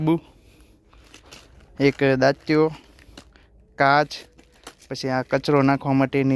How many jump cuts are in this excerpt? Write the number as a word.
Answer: zero